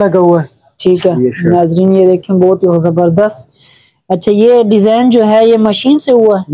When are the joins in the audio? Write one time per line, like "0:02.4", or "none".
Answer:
none